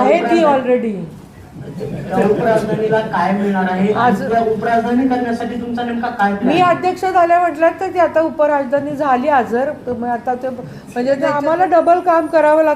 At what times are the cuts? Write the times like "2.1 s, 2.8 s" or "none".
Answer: 11.2 s